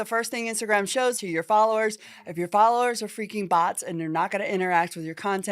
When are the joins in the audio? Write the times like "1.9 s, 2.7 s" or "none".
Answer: 1.2 s